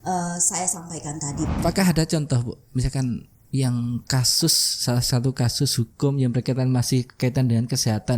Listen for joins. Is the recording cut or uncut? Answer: cut